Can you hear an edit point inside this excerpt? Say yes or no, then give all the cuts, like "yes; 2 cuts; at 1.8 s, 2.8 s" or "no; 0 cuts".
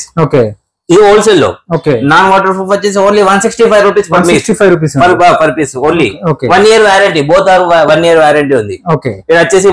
no; 0 cuts